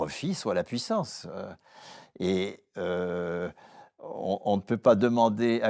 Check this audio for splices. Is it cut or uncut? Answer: uncut